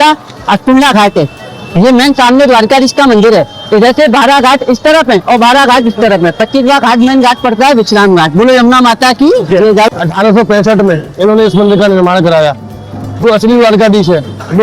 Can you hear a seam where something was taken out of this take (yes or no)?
yes